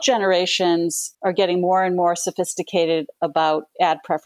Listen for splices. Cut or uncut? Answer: cut